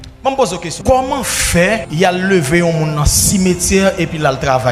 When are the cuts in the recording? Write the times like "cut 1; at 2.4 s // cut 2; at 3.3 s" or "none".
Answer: cut 1; at 0.8 s // cut 2; at 1.9 s